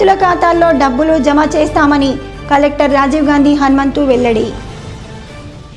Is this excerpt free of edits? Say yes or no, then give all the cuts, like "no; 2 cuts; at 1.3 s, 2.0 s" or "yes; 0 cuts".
yes; 0 cuts